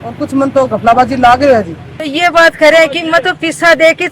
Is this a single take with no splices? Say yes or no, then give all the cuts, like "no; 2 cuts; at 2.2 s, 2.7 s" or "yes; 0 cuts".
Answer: no; 1 cut; at 2.1 s